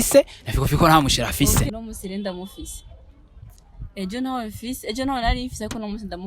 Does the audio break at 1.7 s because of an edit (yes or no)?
yes